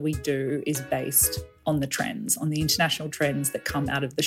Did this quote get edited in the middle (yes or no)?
yes